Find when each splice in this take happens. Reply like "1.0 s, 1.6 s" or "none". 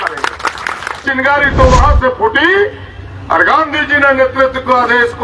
1.0 s